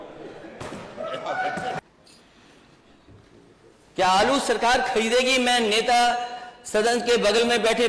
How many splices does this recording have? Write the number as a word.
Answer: one